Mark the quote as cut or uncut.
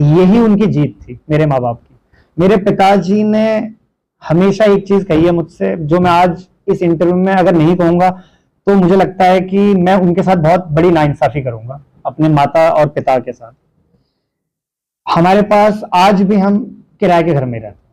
uncut